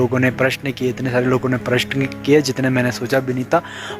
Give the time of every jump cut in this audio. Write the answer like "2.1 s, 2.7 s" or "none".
none